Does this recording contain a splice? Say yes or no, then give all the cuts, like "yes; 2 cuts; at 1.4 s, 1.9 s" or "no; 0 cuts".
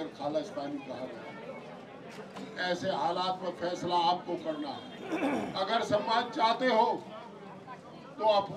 no; 0 cuts